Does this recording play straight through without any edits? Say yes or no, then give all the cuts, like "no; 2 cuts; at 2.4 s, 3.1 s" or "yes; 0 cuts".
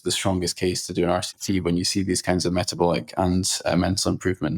yes; 0 cuts